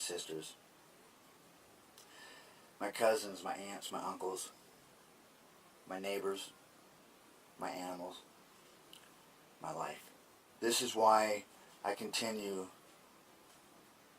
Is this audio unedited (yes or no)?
no